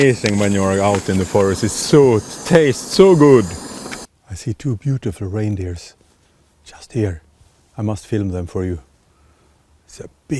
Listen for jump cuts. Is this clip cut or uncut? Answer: cut